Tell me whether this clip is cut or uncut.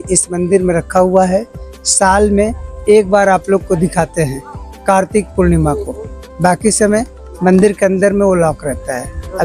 uncut